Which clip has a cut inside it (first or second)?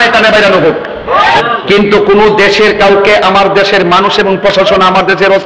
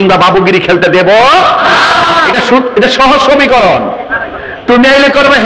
first